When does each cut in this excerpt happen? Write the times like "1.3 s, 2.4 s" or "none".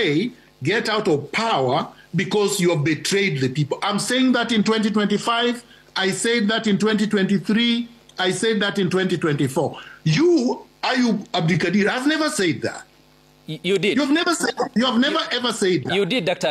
none